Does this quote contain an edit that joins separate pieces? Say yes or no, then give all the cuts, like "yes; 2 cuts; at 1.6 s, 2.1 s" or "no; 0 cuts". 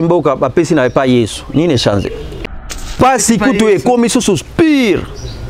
yes; 1 cut; at 2.4 s